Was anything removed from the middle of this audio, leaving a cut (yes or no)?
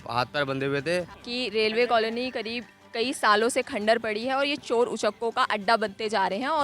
yes